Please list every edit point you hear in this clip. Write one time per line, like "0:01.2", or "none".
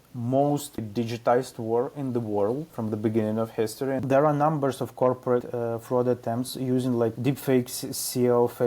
0:00.8
0:02.7
0:04.0
0:05.5
0:07.2

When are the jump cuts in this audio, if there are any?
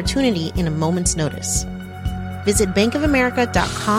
none

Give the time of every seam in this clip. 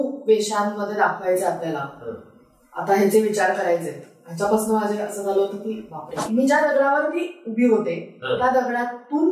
0:06.3

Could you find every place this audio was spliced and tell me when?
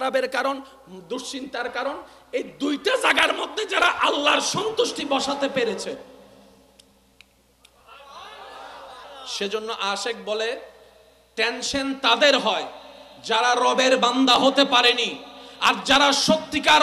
0:09.0

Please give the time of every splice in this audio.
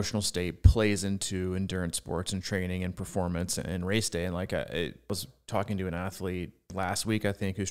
0:05.1
0:06.6

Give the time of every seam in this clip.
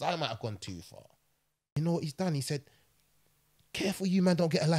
0:01.7

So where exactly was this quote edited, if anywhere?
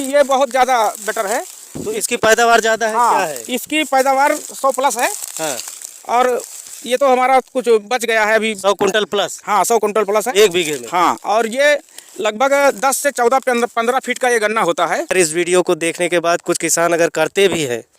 0:01.6
0:15.1

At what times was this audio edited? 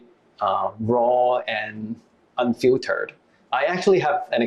none

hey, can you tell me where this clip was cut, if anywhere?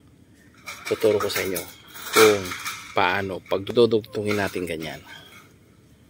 0:03.7

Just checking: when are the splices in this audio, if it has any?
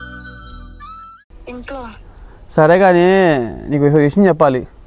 none

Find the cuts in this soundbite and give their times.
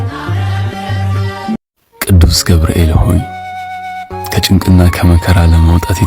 0:01.6

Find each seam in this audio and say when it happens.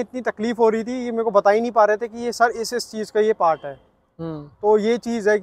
none

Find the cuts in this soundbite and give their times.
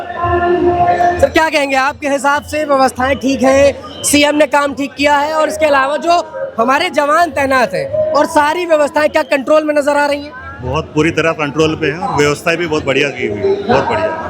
none

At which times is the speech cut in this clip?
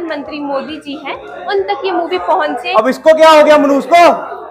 0:02.6

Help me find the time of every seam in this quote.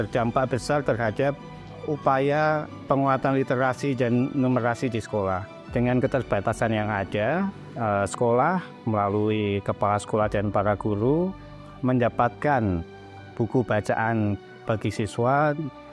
0:14.5

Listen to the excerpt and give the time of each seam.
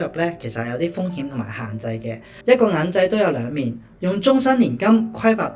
0:02.3

